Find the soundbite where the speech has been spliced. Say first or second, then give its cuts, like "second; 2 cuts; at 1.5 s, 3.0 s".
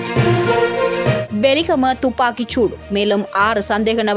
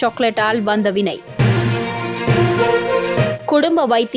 first; 1 cut; at 1.2 s